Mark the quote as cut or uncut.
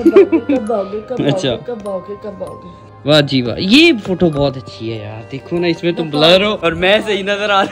cut